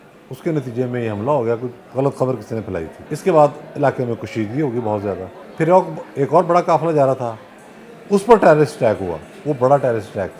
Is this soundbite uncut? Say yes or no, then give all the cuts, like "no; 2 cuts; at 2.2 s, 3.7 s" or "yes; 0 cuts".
no; 2 cuts; at 3.0 s, 5.4 s